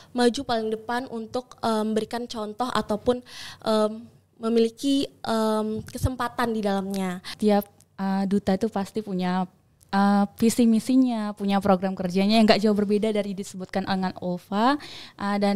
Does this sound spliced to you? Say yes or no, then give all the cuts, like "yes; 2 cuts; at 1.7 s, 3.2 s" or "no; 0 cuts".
yes; 1 cut; at 7.3 s